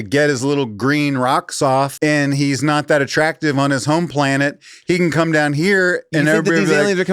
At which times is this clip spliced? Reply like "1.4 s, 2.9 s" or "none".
1.9 s